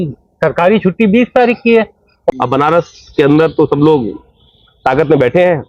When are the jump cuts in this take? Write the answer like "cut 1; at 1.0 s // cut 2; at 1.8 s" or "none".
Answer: cut 1; at 2.1 s